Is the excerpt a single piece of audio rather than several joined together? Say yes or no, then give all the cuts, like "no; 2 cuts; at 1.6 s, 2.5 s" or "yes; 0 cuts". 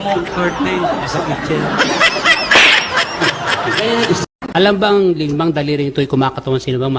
no; 1 cut; at 4.3 s